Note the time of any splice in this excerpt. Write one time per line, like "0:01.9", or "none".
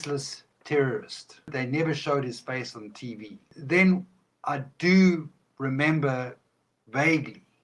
0:01.5
0:03.5